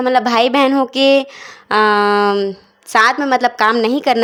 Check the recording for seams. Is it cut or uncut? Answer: uncut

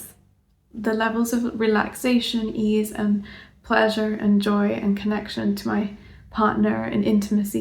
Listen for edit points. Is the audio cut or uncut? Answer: uncut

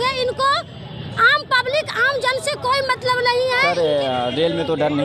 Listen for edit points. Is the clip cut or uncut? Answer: cut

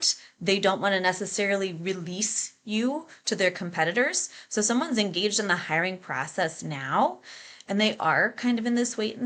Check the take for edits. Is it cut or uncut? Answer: uncut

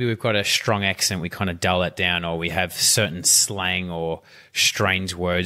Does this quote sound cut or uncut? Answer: uncut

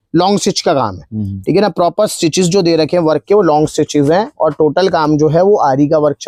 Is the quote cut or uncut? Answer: uncut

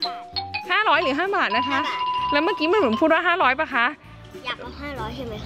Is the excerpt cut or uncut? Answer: uncut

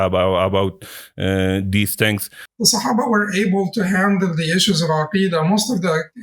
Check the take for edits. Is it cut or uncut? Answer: cut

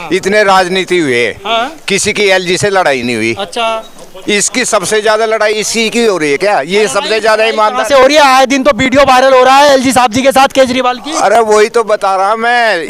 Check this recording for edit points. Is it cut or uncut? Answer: uncut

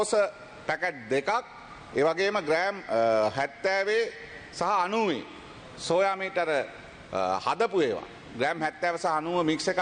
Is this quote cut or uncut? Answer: uncut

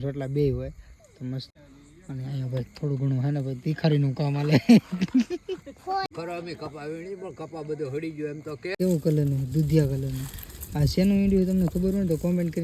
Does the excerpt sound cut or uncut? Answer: cut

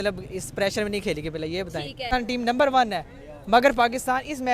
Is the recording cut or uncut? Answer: cut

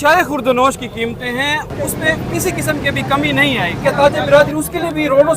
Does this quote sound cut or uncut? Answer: cut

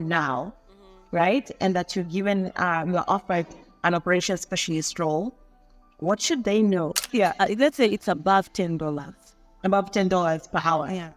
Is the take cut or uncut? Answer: cut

